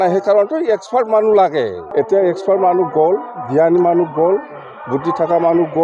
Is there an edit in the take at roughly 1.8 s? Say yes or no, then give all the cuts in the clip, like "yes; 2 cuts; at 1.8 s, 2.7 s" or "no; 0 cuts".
yes; 1 cut; at 1.8 s